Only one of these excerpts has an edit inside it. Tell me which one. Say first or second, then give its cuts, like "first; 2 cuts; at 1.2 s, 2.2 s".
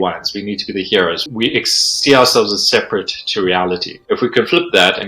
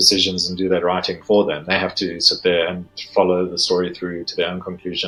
first; 2 cuts; at 1.2 s, 3.9 s